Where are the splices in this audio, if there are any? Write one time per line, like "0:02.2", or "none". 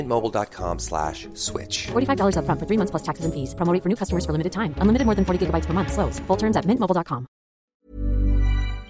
0:07.7